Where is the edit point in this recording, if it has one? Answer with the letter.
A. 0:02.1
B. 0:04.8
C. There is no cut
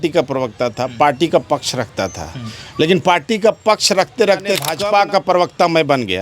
B